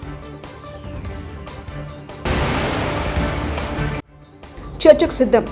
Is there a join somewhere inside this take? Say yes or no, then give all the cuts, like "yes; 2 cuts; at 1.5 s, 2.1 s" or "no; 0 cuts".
yes; 2 cuts; at 2.2 s, 3.8 s